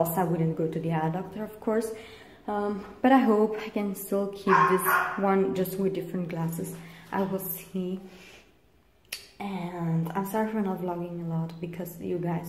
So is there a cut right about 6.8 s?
yes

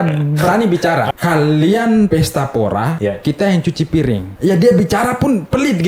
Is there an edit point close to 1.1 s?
yes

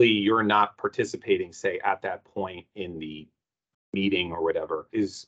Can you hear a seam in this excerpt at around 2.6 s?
no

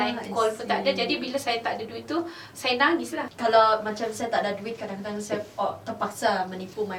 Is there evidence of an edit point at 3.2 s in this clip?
yes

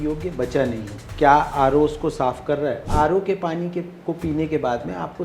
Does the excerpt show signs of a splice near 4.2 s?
no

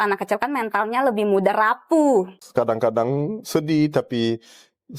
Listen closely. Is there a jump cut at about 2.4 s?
yes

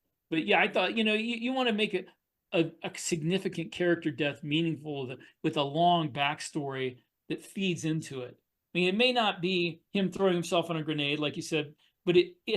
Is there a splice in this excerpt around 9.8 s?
yes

